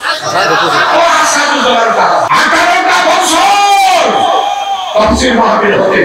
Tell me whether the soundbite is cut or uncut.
cut